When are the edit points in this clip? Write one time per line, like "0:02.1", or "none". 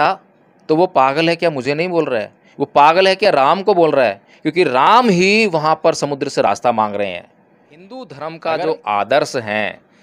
0:07.3

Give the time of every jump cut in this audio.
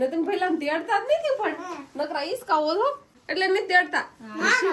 0:03.1

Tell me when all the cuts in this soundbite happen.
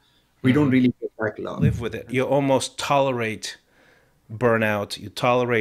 0:01.9

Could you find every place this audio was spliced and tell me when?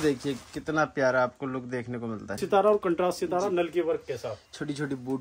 0:02.4

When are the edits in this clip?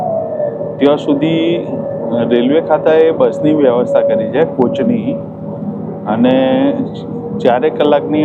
none

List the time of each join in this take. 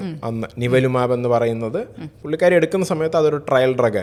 none

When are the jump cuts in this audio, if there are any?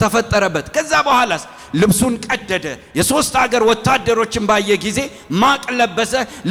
none

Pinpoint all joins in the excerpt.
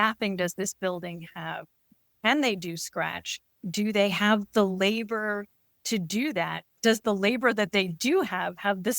0:06.6

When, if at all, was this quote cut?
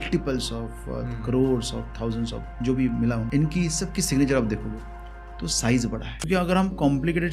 0:03.2
0:06.2

